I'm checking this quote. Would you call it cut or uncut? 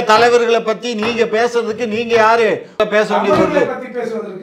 cut